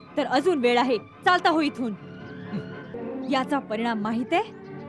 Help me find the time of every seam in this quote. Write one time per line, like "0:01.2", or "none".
0:02.9